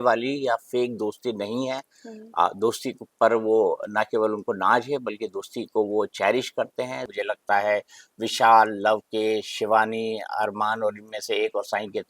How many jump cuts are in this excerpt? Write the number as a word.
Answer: one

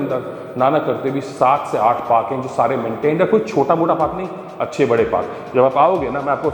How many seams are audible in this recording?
zero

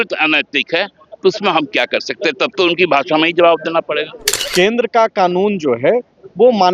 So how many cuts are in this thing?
one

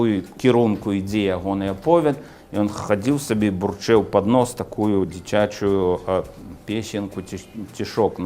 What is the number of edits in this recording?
zero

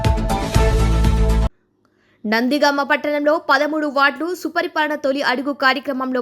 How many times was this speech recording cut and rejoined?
one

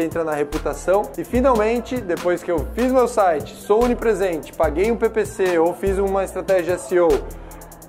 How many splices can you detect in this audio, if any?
one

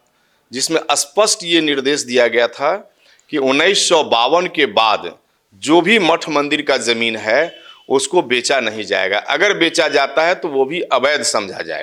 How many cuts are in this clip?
zero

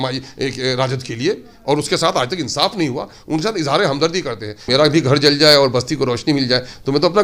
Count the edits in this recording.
one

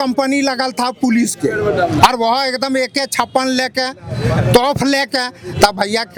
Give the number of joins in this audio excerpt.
zero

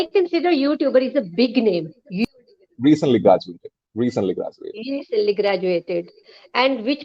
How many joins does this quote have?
one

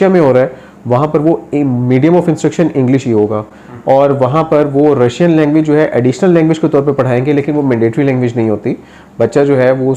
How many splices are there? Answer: zero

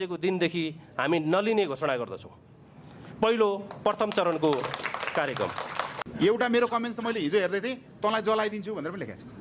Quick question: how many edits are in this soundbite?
one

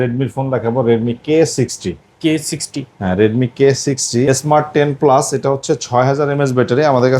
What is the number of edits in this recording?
one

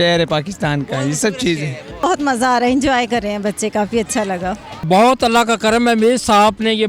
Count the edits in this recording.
two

